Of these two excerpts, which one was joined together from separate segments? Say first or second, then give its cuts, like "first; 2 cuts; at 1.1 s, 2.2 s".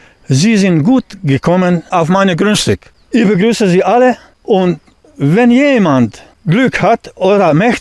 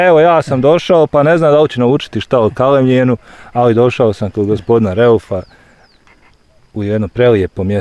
first; 4 cuts; at 1.9 s, 2.9 s, 4.3 s, 6.3 s